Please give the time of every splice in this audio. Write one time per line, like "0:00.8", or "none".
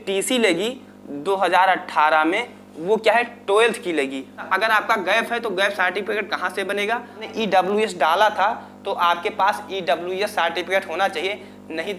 0:04.4
0:07.3